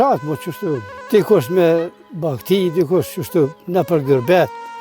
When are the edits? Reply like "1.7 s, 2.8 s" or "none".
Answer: 0.9 s, 3.6 s